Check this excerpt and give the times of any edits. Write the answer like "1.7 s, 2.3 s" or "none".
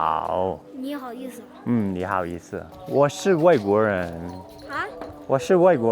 2.7 s